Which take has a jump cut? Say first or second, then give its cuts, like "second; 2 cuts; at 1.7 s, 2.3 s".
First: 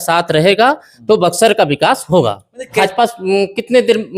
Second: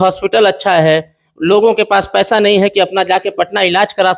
first; 1 cut; at 2.7 s